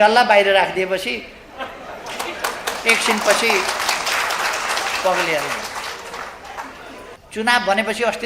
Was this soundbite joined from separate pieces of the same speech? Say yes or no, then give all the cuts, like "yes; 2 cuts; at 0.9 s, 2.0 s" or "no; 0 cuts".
yes; 1 cut; at 7.2 s